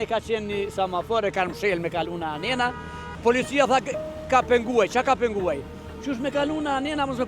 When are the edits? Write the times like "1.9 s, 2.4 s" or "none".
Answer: 3.0 s